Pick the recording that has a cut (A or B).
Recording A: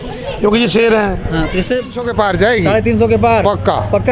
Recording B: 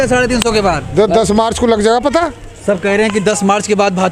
A